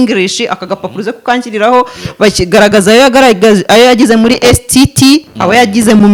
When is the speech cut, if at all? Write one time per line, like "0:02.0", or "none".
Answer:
none